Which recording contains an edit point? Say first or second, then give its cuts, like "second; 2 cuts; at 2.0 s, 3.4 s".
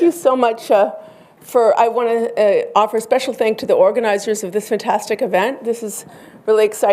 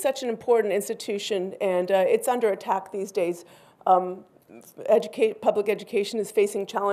first; 1 cut; at 5.0 s